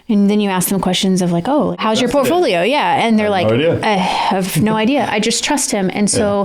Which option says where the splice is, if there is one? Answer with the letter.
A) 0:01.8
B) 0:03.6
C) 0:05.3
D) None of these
A